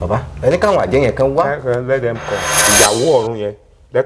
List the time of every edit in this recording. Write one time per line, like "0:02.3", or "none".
0:02.6